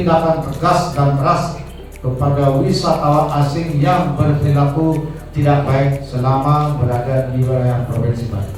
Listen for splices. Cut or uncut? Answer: uncut